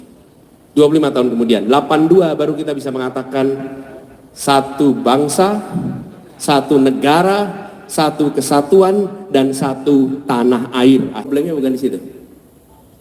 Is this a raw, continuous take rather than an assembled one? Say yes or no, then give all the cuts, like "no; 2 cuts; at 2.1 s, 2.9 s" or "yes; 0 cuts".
no; 1 cut; at 11.3 s